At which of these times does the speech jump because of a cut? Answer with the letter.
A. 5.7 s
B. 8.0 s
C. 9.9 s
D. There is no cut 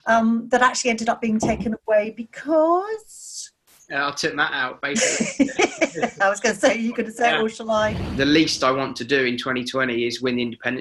B